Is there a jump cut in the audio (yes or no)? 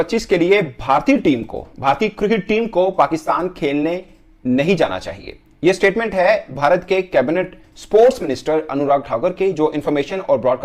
no